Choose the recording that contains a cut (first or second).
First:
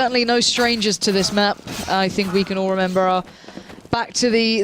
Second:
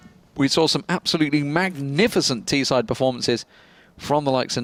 first